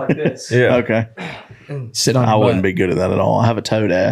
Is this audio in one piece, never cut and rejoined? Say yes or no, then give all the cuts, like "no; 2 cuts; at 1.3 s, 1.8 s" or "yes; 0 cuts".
no; 1 cut; at 2.0 s